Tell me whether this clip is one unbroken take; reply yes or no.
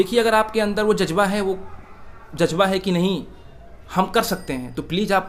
yes